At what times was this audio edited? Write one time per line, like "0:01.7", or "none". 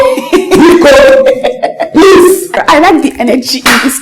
0:02.6